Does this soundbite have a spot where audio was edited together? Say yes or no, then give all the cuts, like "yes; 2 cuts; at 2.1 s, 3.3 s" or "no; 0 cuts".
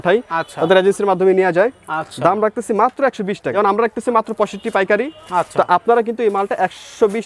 yes; 1 cut; at 3.5 s